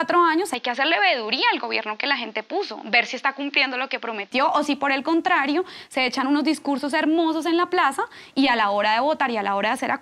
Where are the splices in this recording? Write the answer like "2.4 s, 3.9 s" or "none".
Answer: none